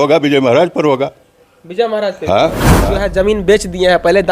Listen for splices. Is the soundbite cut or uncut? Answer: cut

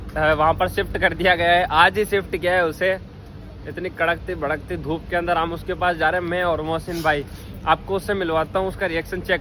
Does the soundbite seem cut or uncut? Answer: uncut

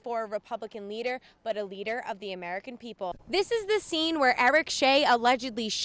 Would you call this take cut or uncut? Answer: cut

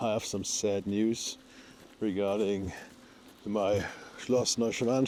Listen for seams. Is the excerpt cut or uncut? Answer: uncut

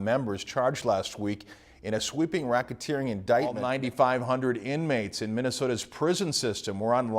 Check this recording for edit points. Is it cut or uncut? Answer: cut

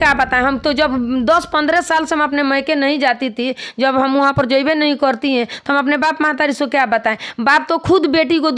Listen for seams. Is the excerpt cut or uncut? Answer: uncut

